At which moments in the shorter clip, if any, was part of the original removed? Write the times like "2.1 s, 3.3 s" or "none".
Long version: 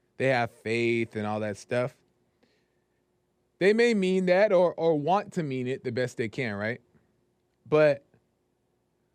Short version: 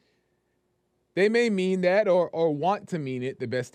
none